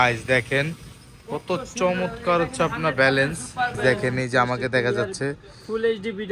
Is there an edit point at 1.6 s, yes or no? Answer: no